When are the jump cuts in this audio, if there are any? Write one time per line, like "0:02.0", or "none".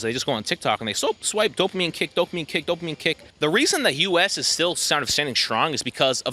0:03.3